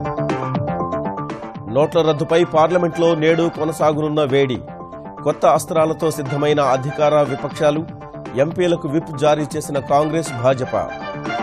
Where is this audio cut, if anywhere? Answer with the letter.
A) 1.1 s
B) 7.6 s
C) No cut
A